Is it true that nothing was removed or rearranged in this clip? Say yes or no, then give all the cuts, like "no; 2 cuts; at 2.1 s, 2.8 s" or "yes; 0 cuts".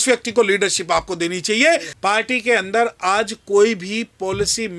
no; 1 cut; at 1.9 s